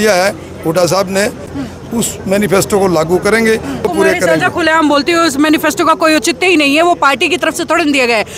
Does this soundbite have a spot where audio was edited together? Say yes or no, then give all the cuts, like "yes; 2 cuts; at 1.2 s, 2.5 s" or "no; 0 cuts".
yes; 2 cuts; at 1.5 s, 3.9 s